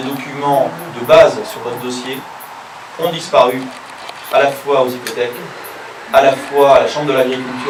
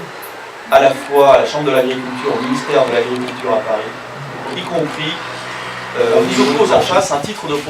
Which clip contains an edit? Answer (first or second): second